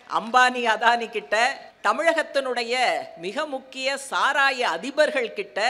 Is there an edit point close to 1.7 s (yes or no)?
yes